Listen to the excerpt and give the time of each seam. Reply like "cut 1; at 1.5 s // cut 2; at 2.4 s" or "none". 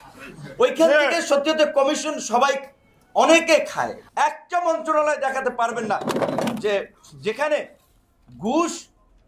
cut 1; at 4.0 s